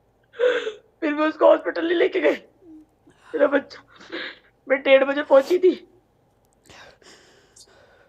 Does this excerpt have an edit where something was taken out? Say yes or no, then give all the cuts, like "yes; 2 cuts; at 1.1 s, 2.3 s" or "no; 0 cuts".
no; 0 cuts